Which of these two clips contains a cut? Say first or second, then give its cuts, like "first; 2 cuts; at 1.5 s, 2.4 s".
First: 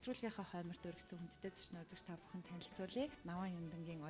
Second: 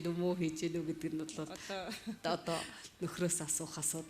first; 1 cut; at 3.2 s